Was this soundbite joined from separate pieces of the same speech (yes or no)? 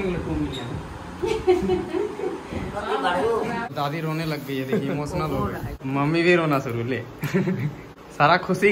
yes